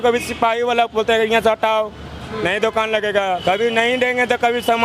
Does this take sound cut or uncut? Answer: cut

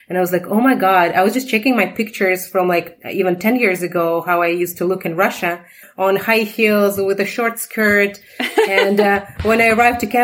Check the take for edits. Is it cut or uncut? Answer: cut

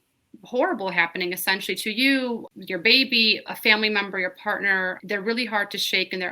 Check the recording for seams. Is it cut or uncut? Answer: cut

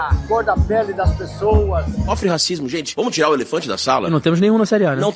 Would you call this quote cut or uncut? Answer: cut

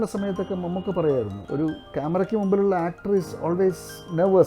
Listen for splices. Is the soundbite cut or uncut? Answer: cut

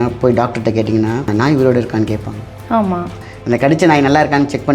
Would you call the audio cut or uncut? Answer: cut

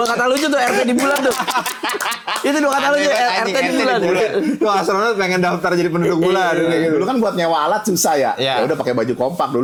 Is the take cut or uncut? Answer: uncut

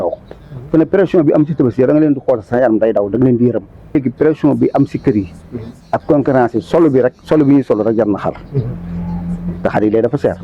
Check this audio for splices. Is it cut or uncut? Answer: cut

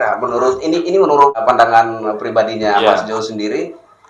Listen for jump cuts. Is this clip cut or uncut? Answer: cut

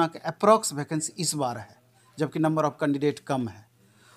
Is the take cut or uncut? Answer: uncut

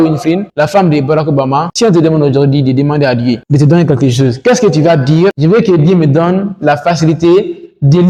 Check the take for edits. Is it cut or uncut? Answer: uncut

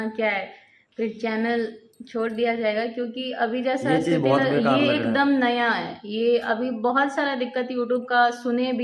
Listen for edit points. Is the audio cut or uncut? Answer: uncut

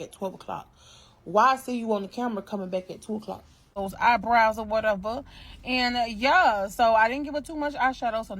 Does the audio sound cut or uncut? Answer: cut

